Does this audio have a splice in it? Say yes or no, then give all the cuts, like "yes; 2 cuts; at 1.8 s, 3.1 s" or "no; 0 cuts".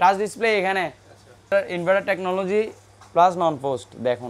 yes; 1 cut; at 1.5 s